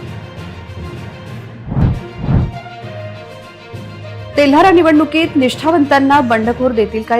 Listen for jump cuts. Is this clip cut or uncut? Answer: cut